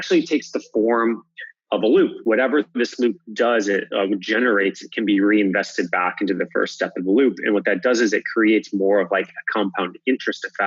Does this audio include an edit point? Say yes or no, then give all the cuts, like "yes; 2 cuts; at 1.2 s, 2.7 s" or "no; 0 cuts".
yes; 1 cut; at 2.2 s